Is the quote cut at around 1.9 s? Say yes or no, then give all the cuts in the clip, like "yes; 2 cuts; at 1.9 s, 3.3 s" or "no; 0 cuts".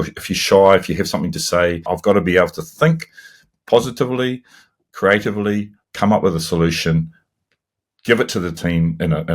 yes; 1 cut; at 1.9 s